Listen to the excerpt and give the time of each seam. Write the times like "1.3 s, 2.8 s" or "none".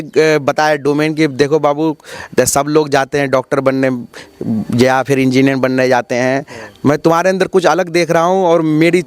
none

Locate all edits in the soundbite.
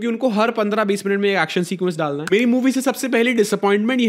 2.2 s

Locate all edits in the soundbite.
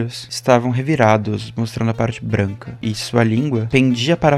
none

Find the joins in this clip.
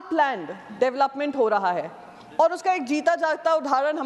none

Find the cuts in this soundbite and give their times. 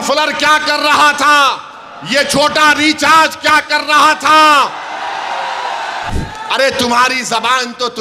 6.1 s

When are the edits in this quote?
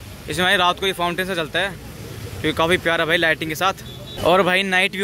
4.1 s

